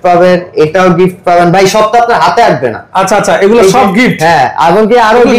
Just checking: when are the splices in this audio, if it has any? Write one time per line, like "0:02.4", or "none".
none